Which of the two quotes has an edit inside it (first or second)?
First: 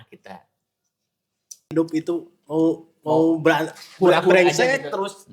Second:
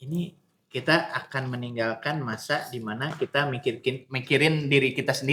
first